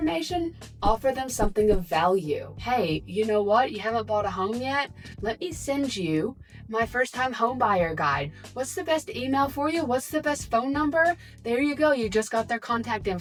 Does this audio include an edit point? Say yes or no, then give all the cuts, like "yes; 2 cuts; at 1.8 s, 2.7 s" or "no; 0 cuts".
no; 0 cuts